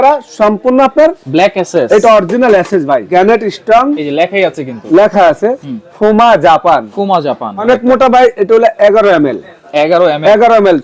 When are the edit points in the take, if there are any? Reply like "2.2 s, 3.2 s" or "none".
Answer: 3.1 s, 7.6 s